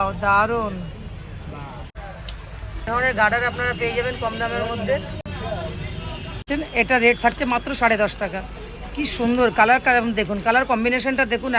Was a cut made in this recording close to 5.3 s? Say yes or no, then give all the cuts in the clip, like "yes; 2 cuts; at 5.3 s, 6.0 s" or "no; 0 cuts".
no; 1 cut; at 1.9 s